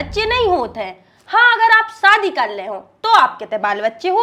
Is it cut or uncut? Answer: uncut